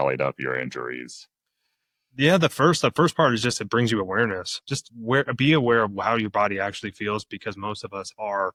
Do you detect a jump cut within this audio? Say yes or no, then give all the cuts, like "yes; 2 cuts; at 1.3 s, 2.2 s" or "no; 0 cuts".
no; 0 cuts